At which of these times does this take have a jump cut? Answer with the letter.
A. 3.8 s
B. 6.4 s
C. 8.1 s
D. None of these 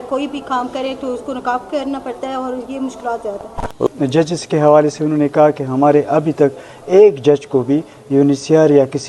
A